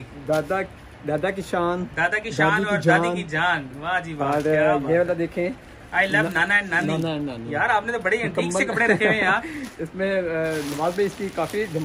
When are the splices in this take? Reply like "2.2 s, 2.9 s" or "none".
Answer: none